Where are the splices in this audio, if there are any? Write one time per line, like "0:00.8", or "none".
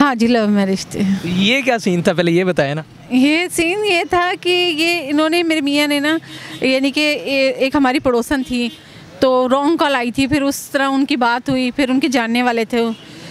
none